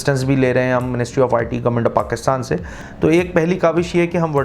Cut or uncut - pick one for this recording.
cut